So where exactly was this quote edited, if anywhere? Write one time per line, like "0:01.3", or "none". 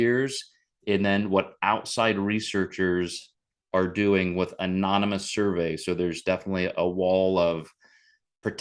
none